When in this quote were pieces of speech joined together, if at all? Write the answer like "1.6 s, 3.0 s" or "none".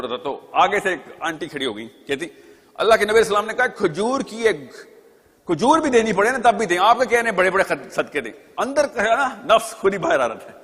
none